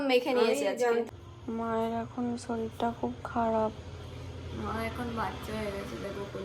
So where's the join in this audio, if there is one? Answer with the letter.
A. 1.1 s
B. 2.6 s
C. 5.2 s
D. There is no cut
A